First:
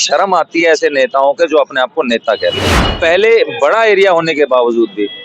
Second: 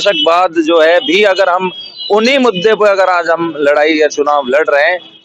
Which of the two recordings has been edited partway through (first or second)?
first